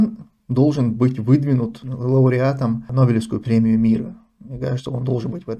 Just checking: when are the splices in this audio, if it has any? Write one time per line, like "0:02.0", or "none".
0:02.9